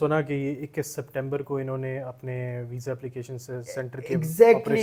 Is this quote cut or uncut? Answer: uncut